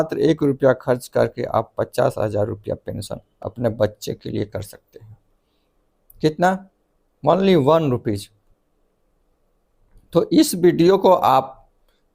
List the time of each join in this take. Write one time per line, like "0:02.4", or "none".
none